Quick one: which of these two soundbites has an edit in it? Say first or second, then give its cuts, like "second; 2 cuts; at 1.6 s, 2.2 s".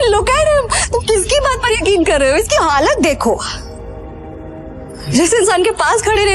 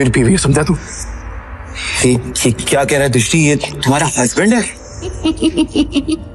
second; 1 cut; at 5.2 s